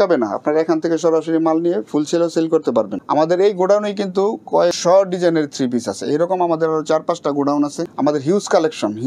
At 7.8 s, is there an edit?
yes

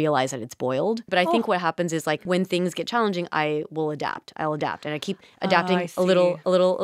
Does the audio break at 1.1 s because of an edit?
yes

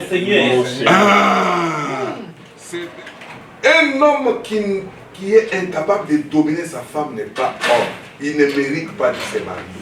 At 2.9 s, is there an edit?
yes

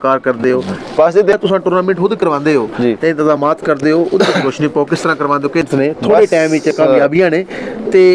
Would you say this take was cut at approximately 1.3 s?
yes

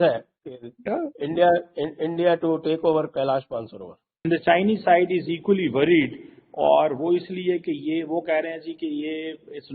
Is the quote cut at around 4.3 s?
yes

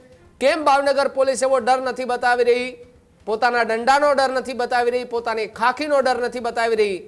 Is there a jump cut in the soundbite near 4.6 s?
no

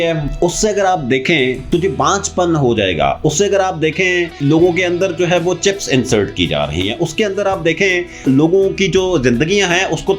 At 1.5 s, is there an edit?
no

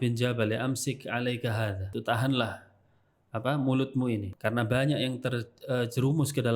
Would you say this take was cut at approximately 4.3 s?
yes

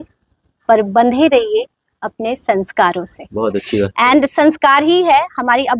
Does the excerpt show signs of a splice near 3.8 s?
no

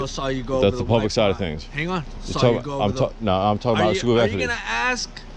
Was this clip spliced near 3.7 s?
no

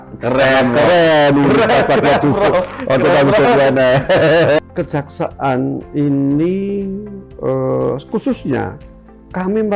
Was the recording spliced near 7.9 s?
no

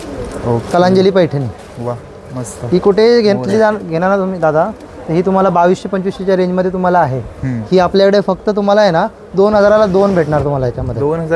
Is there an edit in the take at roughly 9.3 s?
no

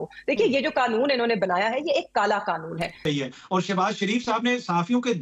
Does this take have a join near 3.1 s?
yes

